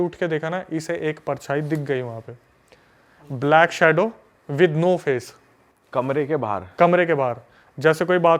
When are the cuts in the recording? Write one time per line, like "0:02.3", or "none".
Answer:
none